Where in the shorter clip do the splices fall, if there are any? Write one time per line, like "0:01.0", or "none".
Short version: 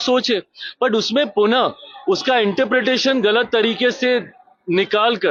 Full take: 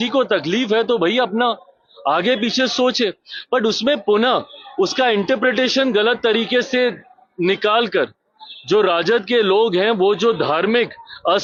none